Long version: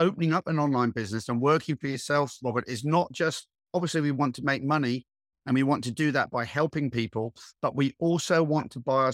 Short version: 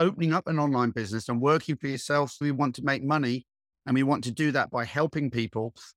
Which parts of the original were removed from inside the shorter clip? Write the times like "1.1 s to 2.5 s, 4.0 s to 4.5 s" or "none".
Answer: 2.4 s to 4.0 s